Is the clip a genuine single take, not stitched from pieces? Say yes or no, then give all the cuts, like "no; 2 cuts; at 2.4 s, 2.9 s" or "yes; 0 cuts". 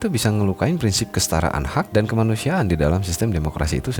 yes; 0 cuts